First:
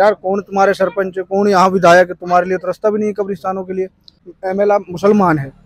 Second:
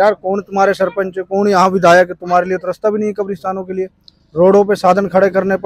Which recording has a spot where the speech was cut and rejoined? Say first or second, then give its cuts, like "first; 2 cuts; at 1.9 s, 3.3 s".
first; 1 cut; at 4.2 s